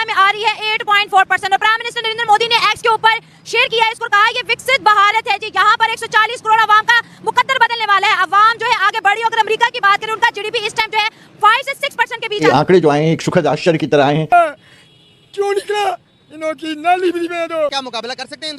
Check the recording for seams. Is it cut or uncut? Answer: cut